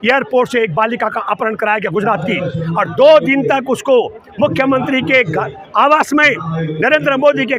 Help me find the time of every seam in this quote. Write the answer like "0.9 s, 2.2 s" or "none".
none